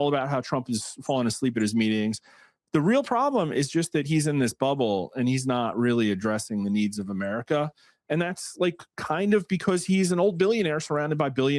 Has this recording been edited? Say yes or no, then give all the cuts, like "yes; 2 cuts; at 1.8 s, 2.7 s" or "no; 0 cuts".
no; 0 cuts